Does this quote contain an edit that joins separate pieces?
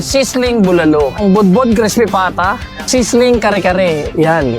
yes; 2 cuts; at 1.2 s, 2.7 s

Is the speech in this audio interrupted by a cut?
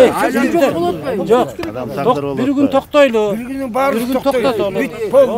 no; 0 cuts

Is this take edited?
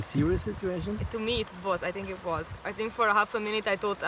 yes; 2 cuts; at 1.1 s, 2.6 s

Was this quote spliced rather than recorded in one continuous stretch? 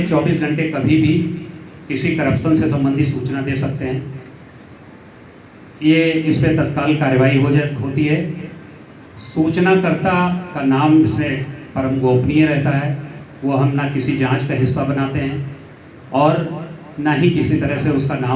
no; 0 cuts

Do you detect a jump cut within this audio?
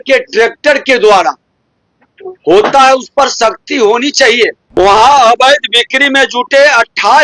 yes; 1 cut; at 4.6 s

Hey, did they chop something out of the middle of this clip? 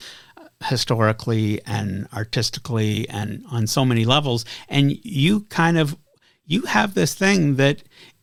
no; 0 cuts

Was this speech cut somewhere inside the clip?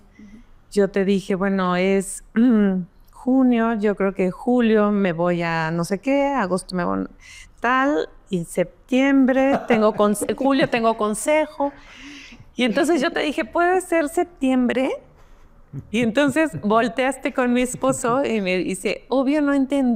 no; 0 cuts

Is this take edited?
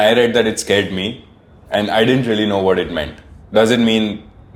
no; 0 cuts

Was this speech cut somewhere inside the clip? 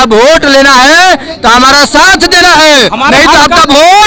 no; 0 cuts

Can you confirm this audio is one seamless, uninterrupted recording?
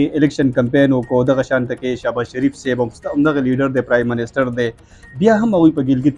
yes; 0 cuts

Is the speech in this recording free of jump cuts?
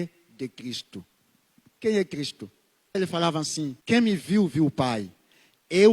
no; 2 cuts; at 3.0 s, 3.8 s

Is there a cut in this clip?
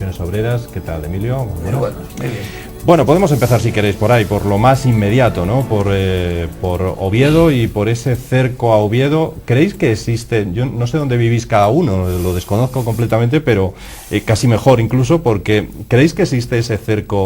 yes; 1 cut; at 11.4 s

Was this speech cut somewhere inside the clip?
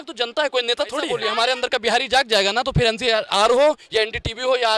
yes; 1 cut; at 1.1 s

